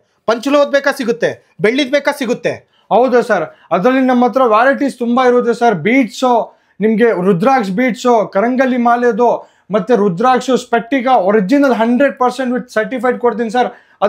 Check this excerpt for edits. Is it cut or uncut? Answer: uncut